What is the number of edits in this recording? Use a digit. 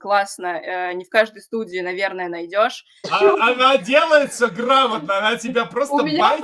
1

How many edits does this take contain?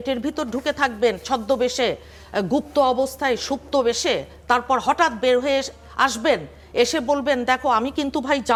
0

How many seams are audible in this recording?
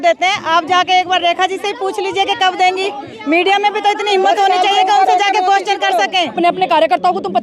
1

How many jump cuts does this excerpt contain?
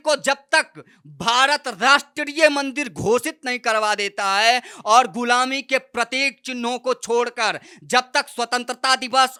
0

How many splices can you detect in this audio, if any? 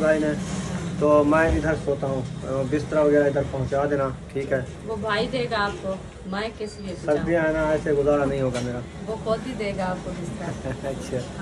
1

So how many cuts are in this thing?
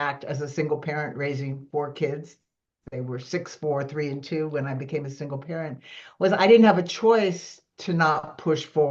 0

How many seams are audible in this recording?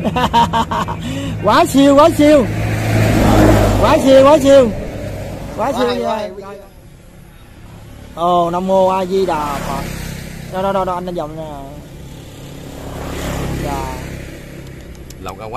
1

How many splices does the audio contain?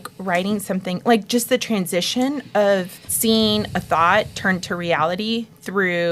1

